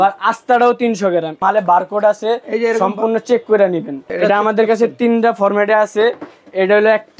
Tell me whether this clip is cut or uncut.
cut